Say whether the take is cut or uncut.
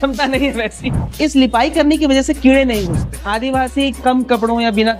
cut